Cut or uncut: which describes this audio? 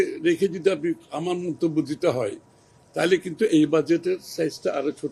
uncut